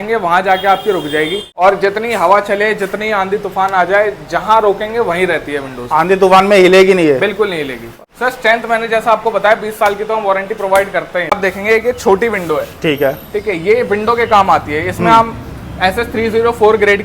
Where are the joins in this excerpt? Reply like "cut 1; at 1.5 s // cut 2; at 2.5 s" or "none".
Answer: cut 1; at 1.5 s // cut 2; at 8.0 s // cut 3; at 11.4 s